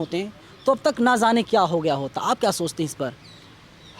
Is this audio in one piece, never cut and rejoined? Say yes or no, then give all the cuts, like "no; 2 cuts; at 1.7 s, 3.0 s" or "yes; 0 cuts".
yes; 0 cuts